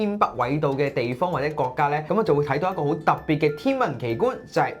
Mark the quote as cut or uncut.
cut